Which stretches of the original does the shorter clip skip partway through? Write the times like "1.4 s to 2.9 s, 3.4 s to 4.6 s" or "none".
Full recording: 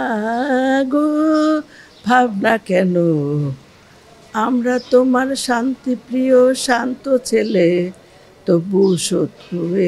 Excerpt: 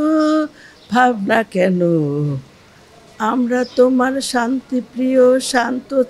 none